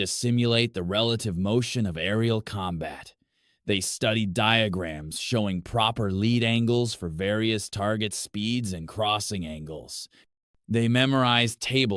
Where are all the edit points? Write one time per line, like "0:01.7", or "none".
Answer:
none